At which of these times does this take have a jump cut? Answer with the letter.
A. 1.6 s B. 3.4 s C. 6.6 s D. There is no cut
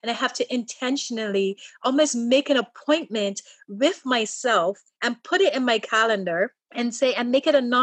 C